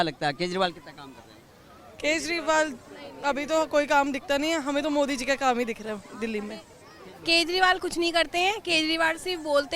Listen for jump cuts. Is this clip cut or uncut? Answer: uncut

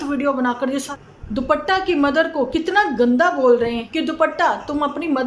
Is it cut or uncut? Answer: cut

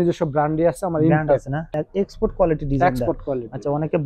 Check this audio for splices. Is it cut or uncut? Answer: cut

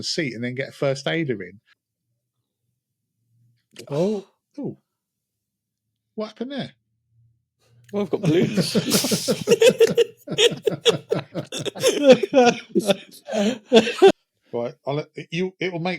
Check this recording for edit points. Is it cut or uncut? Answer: cut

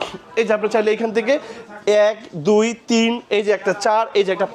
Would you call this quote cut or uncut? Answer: uncut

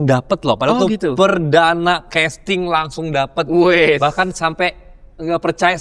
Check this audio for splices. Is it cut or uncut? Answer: uncut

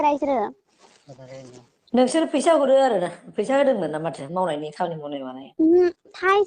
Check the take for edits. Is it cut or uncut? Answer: uncut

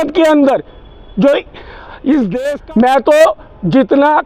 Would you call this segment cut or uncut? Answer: cut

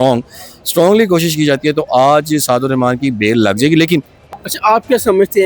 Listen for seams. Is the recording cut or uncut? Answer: cut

